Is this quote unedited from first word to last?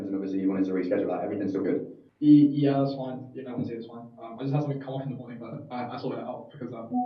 no; 1 cut; at 2.0 s

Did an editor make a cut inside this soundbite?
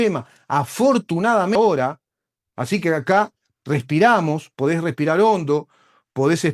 yes; 1 cut; at 1.5 s

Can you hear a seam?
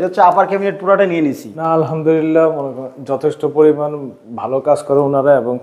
yes; 1 cut; at 1.5 s

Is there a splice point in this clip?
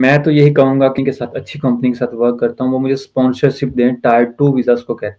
yes; 1 cut; at 0.9 s

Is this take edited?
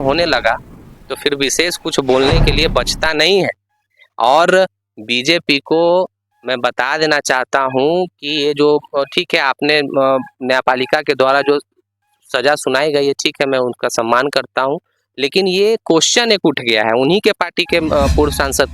no; 0 cuts

